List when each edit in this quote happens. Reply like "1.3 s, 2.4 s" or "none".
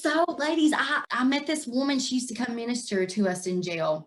1.0 s